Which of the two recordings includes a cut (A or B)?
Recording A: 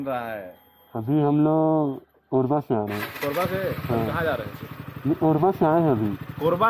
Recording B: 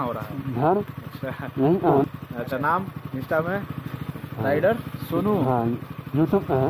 B